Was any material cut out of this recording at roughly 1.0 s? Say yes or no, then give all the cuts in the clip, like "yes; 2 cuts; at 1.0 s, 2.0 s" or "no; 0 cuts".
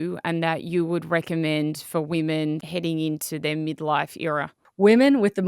no; 2 cuts; at 2.6 s, 4.6 s